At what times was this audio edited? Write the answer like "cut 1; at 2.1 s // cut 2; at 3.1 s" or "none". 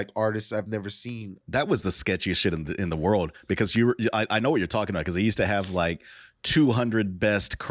cut 1; at 1.3 s